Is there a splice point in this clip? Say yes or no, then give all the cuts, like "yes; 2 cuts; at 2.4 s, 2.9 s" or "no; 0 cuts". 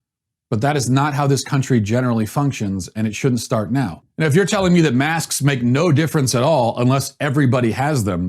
yes; 1 cut; at 4.0 s